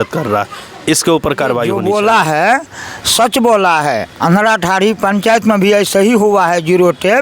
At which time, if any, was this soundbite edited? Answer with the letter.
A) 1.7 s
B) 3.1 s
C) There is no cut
A